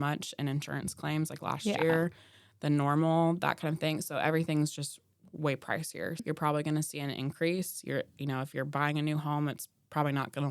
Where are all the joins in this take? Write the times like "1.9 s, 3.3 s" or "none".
6.2 s